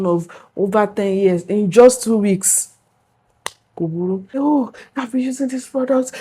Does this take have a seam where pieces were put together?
yes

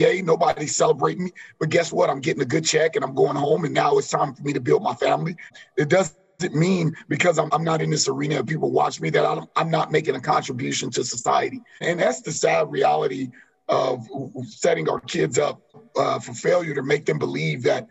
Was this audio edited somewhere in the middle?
yes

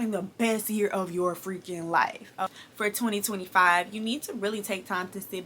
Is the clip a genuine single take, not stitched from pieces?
no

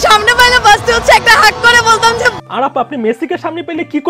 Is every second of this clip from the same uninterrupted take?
yes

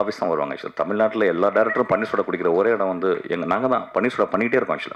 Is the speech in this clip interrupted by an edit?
no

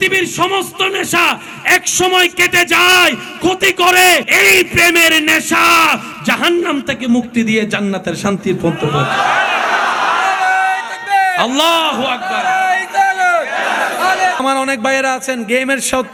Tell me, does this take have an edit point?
no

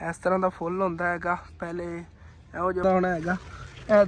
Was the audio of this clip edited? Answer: yes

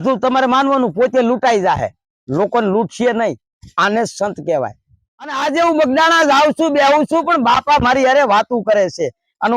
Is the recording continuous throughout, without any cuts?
no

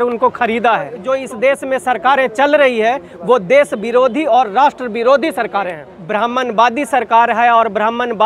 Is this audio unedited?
no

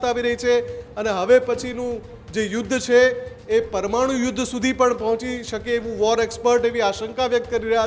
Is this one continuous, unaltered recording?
yes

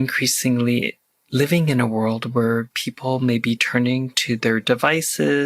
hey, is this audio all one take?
yes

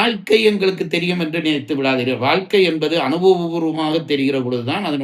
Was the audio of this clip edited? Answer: no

